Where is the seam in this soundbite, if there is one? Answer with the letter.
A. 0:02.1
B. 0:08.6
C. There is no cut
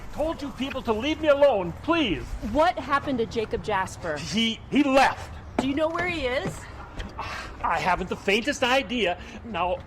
C